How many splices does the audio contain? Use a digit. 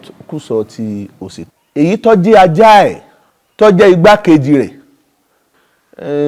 1